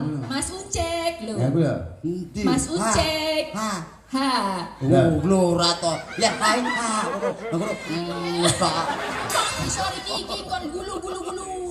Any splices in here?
yes; 1 cut; at 9.6 s

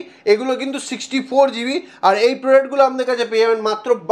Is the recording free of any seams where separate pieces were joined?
yes; 0 cuts

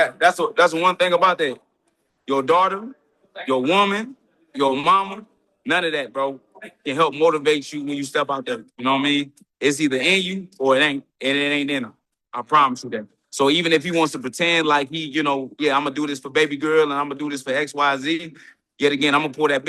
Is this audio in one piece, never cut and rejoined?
yes; 0 cuts

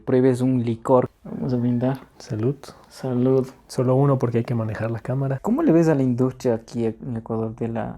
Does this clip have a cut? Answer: yes; 2 cuts; at 1.1 s, 5.4 s

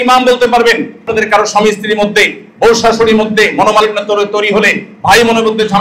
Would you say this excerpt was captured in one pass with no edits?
no; 1 cut; at 1.1 s

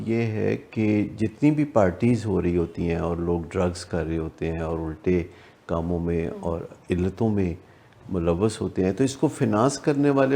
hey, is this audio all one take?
yes; 0 cuts

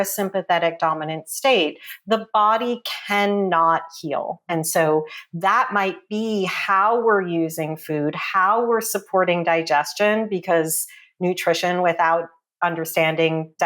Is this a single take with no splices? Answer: yes; 0 cuts

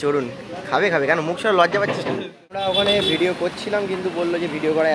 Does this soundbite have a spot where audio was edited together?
yes; 1 cut; at 2.6 s

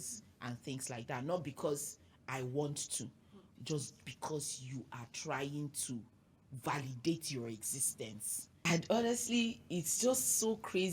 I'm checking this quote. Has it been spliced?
yes; 1 cut; at 8.4 s

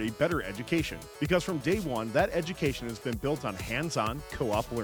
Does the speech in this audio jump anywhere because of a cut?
no; 0 cuts

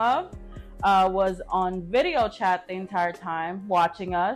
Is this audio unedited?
yes; 0 cuts

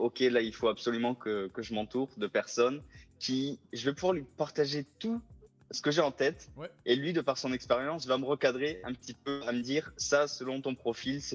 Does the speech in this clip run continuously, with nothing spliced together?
yes; 0 cuts

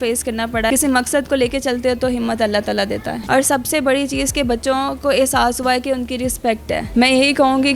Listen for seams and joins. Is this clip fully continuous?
no; 3 cuts; at 0.7 s, 3.2 s, 6.8 s

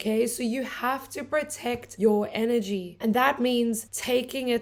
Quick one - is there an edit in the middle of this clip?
no; 0 cuts

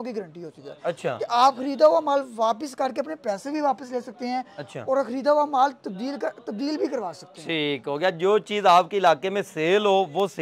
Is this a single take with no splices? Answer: yes; 0 cuts

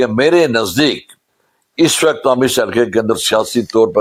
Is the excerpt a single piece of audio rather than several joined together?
yes; 0 cuts

